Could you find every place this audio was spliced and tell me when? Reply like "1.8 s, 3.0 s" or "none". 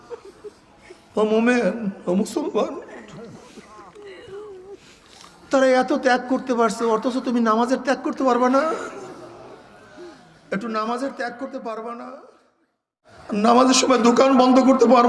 13.1 s